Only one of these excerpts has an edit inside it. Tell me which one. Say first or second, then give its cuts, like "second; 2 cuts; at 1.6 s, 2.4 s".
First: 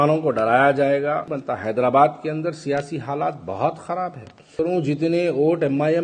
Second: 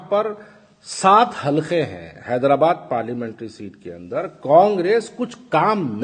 first; 2 cuts; at 1.3 s, 4.5 s